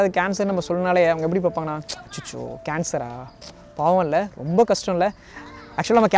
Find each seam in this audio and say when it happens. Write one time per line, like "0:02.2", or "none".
none